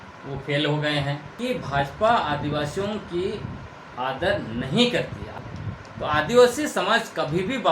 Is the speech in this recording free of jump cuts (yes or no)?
no